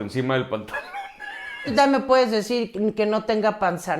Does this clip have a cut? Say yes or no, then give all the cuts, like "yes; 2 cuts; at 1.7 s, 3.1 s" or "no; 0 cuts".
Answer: yes; 1 cut; at 1.7 s